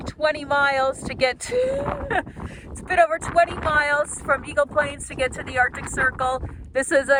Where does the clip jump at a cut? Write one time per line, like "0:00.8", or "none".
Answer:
none